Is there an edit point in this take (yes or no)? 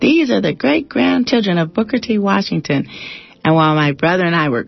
no